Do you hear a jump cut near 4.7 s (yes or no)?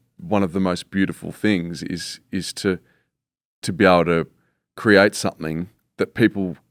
no